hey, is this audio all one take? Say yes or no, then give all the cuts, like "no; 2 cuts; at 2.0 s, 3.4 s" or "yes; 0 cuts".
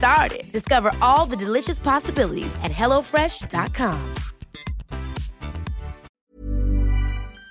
no; 1 cut; at 6.1 s